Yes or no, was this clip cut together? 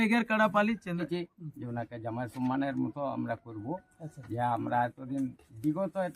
yes